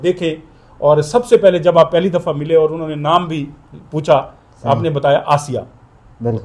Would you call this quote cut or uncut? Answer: uncut